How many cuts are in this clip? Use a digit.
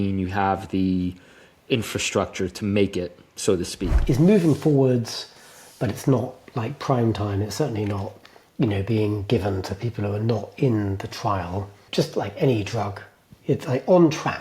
2